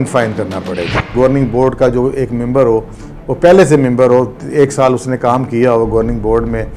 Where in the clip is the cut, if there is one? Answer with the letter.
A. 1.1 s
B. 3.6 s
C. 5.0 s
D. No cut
A